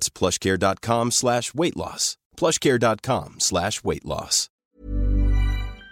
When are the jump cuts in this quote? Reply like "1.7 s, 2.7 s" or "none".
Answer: 4.6 s

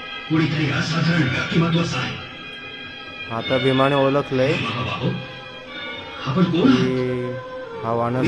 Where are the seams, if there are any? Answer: none

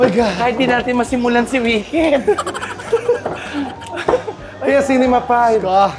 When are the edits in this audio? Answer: none

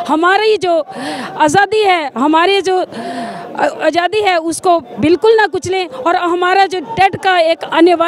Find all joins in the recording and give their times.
none

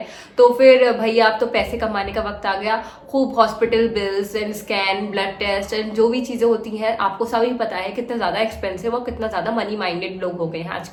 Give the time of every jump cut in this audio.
none

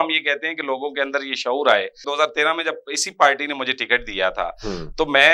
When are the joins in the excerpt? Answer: 2.0 s

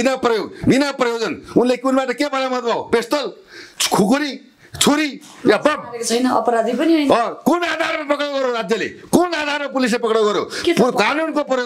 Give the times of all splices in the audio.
none

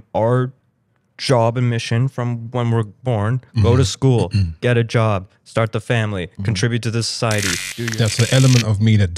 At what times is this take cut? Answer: 7.6 s

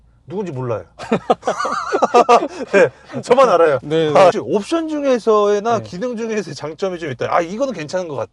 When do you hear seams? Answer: 4.3 s

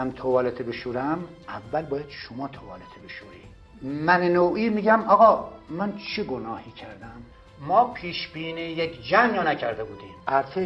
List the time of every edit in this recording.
7.2 s

